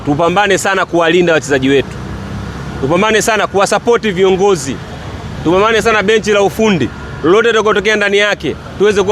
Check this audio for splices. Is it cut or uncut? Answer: uncut